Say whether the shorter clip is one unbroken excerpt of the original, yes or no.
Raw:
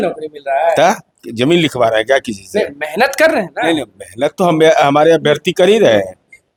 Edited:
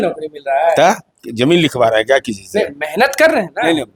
yes